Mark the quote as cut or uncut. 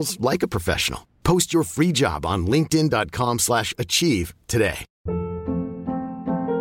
cut